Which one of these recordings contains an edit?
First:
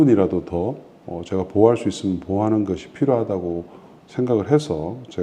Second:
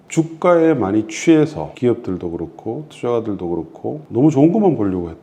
second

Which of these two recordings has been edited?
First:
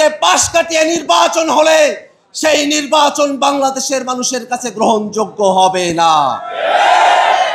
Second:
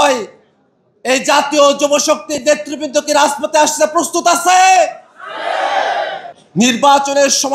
second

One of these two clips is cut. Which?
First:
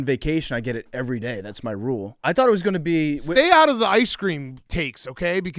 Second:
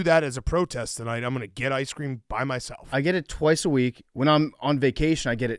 first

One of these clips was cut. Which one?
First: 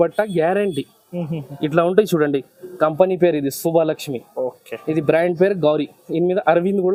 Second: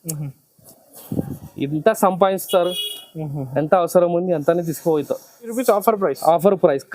second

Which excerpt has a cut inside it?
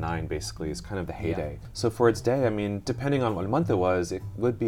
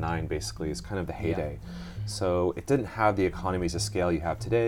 first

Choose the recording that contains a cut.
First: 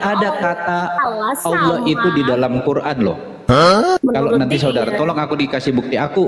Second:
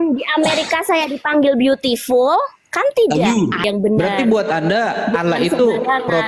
second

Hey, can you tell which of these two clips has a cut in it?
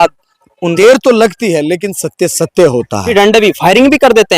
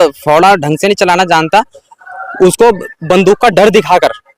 first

